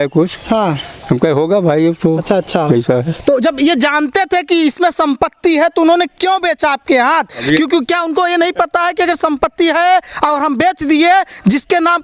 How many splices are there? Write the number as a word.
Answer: zero